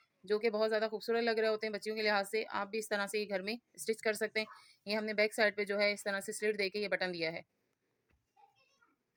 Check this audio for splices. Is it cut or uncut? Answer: uncut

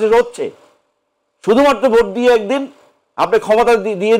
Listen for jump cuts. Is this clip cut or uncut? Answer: uncut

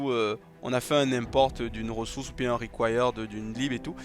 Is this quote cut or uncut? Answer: uncut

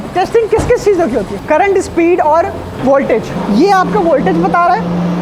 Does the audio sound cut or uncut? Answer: cut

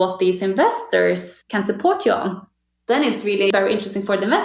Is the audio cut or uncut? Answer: cut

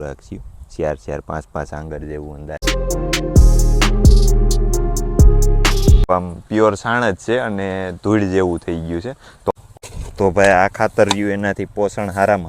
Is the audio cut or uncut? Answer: cut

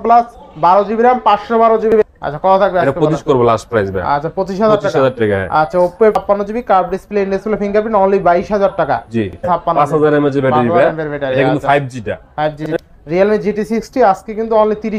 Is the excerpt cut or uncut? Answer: cut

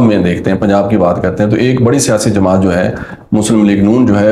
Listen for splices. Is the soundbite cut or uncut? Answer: uncut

